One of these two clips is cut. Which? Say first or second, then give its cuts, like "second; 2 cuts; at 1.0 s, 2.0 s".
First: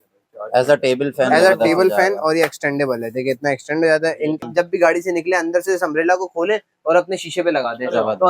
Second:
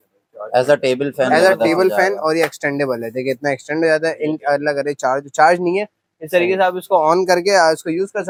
first; 1 cut; at 4.4 s